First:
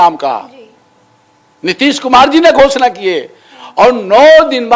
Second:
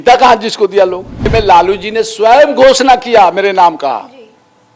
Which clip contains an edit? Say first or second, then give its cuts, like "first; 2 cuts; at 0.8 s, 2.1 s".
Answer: second; 1 cut; at 1.3 s